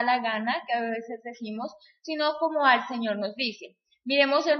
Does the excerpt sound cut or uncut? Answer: uncut